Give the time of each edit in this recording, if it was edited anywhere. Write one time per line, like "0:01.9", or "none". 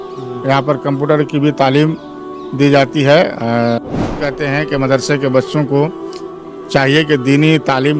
0:04.2